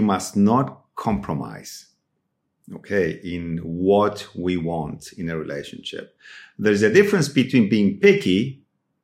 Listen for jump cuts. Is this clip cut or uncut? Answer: uncut